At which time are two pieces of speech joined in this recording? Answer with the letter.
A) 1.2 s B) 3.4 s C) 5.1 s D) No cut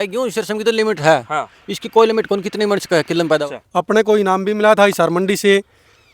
B